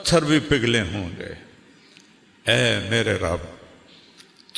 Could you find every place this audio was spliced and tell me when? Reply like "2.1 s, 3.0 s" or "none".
none